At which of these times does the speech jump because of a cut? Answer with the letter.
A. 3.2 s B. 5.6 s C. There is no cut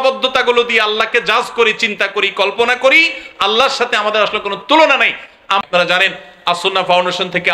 B